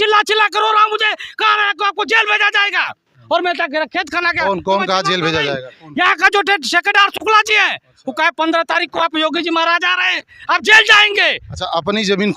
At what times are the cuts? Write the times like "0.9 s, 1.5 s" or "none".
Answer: none